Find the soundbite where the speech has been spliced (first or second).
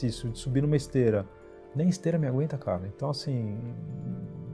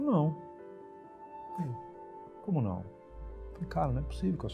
second